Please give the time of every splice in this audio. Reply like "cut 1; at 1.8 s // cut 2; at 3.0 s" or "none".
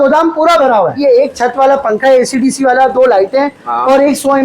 cut 1; at 1.0 s